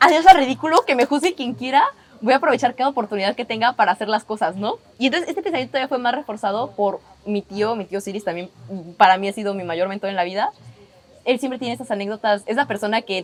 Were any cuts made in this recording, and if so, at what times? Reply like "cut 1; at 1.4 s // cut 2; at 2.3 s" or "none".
none